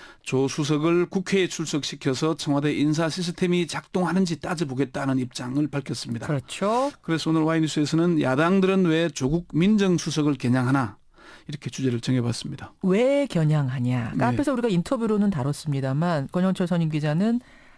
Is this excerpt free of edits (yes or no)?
yes